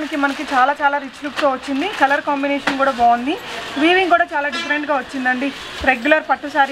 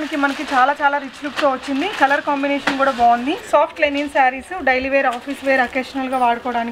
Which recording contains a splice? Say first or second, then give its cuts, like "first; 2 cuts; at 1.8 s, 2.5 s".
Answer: second; 1 cut; at 3.4 s